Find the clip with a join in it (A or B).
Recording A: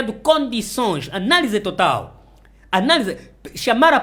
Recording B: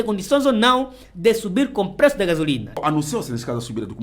B